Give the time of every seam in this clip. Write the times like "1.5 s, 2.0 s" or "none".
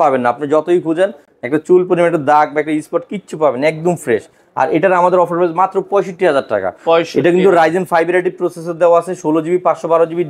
none